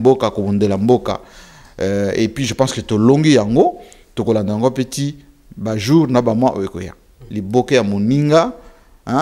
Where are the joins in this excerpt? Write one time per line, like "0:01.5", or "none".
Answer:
0:07.1